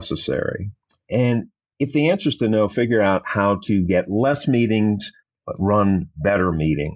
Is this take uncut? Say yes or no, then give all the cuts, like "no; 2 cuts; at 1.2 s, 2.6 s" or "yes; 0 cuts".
yes; 0 cuts